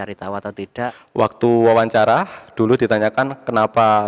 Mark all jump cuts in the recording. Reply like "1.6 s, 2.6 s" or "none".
1.0 s